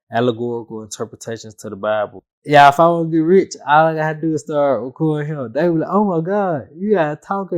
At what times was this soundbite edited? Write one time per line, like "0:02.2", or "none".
0:02.1

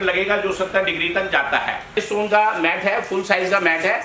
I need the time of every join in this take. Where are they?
0:01.9

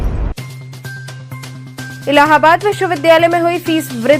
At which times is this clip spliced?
0:01.7

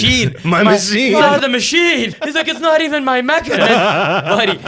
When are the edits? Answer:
0:01.2
0:02.2
0:03.5

